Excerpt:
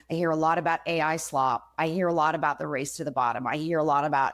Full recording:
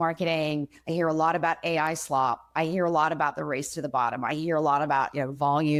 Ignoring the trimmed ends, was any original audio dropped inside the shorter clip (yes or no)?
no